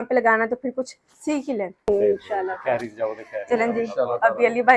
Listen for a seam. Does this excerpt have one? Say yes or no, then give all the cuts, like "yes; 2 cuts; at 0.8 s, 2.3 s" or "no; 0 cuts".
yes; 1 cut; at 1.8 s